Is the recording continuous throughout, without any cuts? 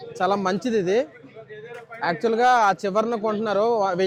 yes; 0 cuts

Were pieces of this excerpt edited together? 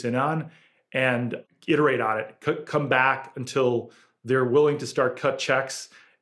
yes; 1 cut; at 1.4 s

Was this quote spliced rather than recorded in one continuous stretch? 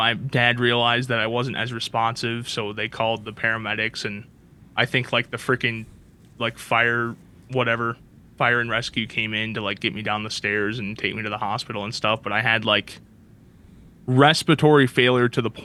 no; 0 cuts

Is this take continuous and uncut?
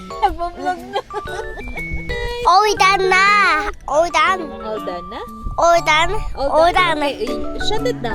no; 1 cut; at 2.1 s

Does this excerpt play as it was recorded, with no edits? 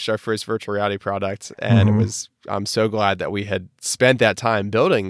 yes; 0 cuts

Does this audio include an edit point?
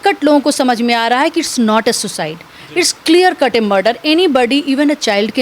no; 0 cuts

